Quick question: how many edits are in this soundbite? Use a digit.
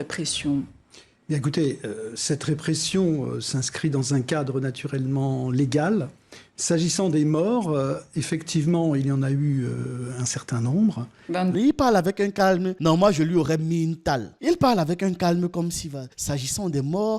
1